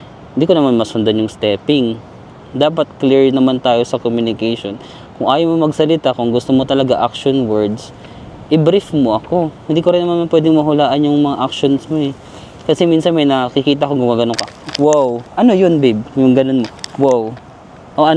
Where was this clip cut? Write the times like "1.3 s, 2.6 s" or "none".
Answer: none